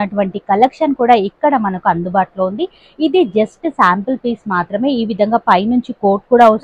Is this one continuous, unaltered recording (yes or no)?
yes